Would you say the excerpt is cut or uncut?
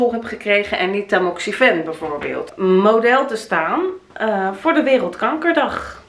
cut